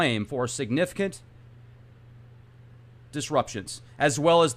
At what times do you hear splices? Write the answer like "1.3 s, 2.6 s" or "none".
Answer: none